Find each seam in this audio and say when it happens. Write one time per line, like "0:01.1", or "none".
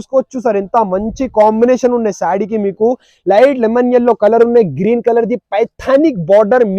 none